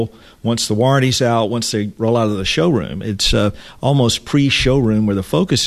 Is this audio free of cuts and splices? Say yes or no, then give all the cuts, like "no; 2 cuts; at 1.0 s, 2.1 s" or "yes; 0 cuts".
yes; 0 cuts